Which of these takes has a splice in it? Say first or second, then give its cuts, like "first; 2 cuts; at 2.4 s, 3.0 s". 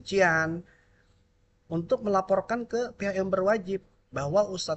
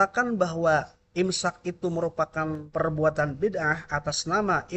second; 2 cuts; at 1.0 s, 2.6 s